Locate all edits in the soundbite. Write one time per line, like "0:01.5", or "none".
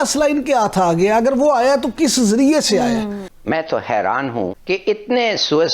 0:03.2